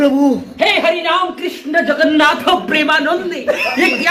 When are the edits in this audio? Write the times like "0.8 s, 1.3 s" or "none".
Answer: none